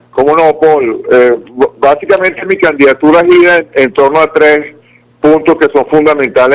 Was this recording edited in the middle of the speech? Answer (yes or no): no